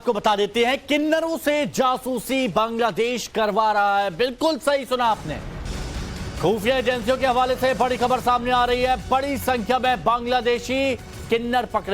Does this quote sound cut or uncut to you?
cut